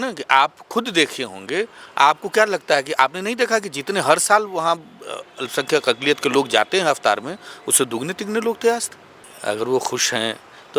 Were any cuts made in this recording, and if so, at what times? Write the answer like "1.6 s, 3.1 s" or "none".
9.3 s